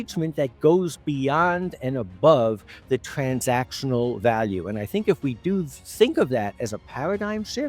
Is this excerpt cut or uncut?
uncut